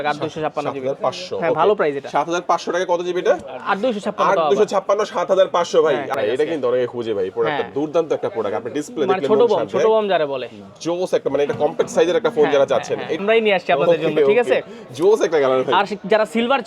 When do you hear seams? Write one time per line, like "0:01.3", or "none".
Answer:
0:06.1
0:13.2